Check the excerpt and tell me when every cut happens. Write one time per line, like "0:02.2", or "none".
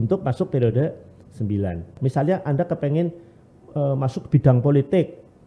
0:01.9